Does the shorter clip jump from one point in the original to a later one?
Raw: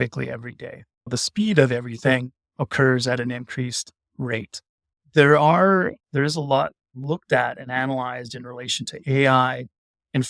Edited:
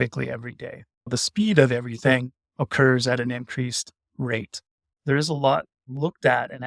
yes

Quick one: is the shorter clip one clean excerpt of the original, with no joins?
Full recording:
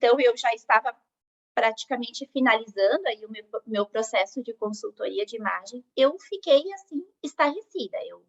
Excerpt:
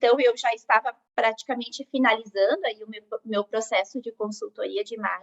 no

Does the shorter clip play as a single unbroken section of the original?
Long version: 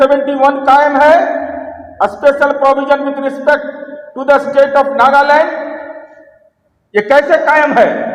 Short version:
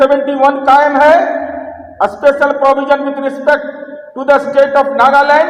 yes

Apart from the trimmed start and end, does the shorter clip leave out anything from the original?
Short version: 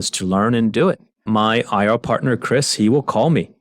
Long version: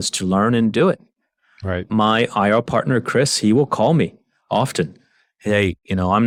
yes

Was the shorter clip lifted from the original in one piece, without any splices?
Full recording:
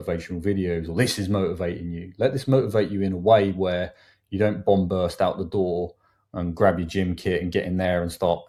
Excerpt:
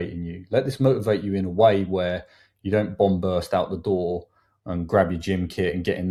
yes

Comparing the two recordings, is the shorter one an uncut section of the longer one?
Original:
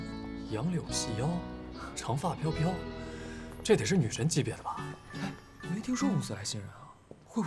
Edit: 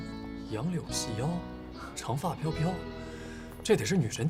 yes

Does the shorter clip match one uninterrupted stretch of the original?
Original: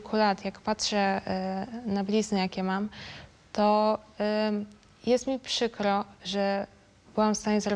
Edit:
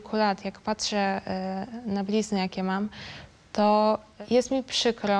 no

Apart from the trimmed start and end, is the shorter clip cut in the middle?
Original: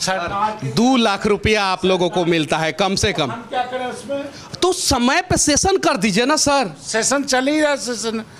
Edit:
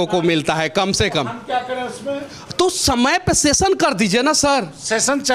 no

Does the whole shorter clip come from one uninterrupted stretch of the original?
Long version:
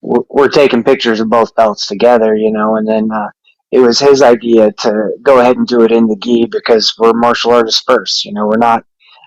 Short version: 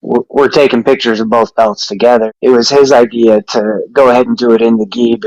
no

